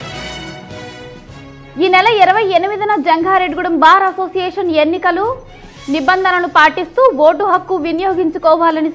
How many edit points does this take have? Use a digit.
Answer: 1